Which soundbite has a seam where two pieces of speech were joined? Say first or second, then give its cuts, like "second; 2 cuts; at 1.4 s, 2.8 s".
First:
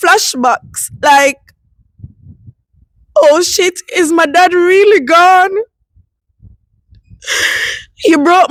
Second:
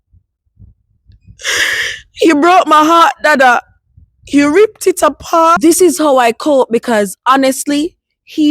second; 1 cut; at 5.5 s